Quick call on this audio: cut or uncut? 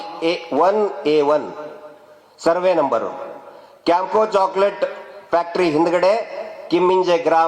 uncut